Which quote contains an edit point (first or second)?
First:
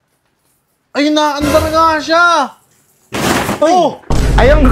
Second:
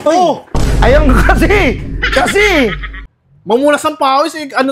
second